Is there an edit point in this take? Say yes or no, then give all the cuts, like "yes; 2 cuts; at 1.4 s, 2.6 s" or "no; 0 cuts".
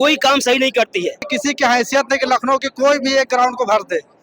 yes; 1 cut; at 1.3 s